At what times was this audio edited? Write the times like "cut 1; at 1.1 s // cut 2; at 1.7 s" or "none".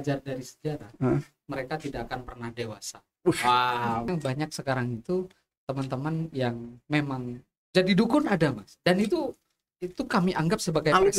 cut 1; at 4.1 s